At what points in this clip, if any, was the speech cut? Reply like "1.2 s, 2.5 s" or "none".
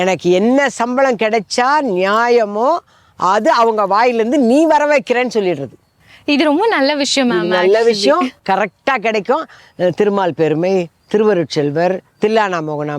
9.6 s